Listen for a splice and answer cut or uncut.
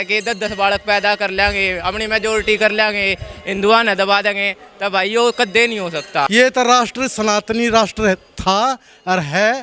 cut